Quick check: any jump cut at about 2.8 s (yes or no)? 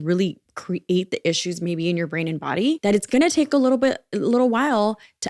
yes